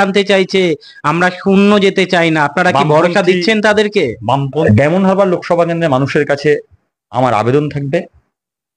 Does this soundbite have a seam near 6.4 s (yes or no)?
no